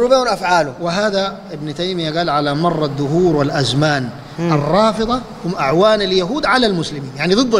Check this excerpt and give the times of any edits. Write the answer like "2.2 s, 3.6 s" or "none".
none

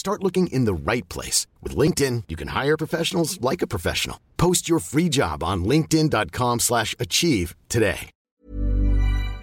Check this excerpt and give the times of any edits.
8.3 s

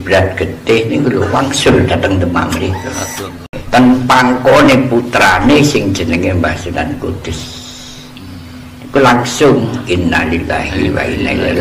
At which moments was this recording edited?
3.6 s

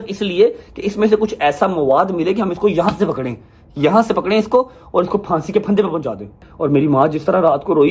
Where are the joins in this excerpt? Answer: 6.5 s

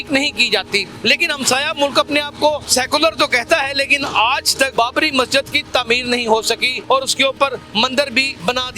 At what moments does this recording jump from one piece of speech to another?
0.9 s, 2.6 s, 4.7 s, 6.7 s, 7.8 s

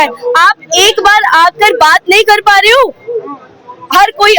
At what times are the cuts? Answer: none

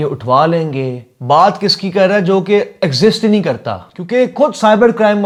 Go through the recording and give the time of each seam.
none

